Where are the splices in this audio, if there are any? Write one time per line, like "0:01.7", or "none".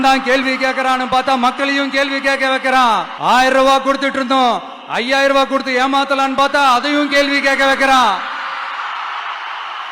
0:03.1